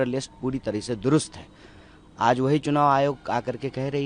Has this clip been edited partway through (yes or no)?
no